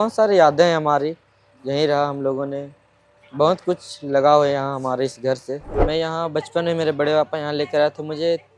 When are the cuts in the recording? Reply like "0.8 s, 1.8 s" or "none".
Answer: 5.7 s